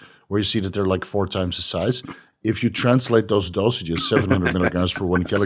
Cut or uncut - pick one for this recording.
uncut